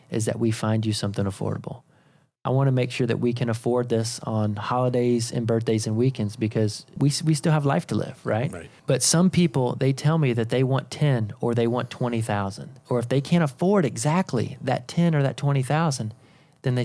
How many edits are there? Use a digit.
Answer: 3